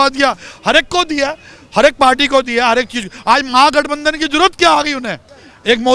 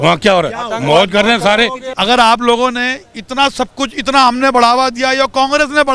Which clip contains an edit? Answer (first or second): second